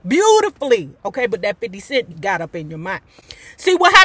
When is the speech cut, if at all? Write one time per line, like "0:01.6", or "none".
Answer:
0:02.1